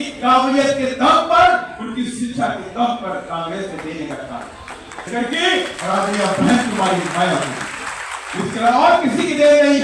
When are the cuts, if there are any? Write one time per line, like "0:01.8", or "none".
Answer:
0:05.1